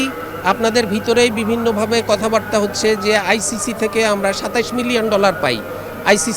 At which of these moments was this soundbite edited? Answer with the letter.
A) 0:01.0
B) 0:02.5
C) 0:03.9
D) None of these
D